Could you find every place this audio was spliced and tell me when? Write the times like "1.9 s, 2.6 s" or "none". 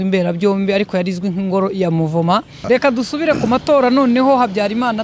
2.6 s